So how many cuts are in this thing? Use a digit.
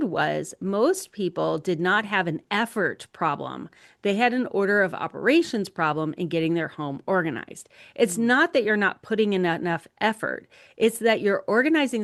0